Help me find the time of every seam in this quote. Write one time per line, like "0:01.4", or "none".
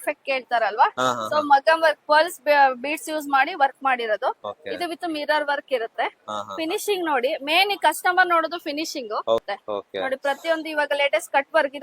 0:04.5
0:09.4